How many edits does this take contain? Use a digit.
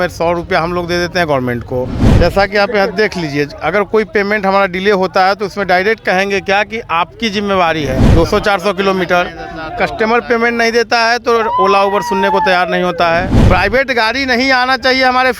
3